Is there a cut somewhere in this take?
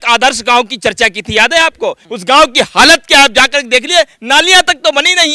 yes; 1 cut; at 2.1 s

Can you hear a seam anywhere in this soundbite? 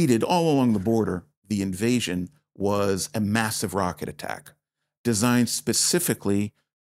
no; 0 cuts

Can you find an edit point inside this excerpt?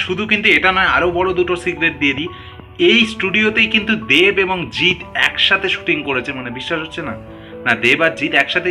no; 0 cuts

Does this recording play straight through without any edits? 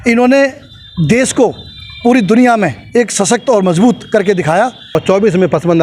no; 1 cut; at 4.9 s

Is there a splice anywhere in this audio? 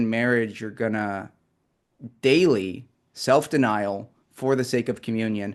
no; 0 cuts

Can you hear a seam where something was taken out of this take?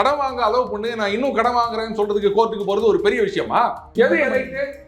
yes; 1 cut; at 3.9 s

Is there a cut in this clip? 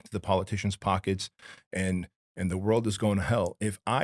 no; 0 cuts

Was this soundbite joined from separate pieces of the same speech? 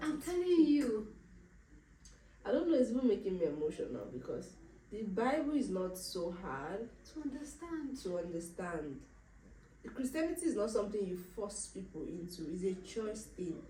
no; 0 cuts

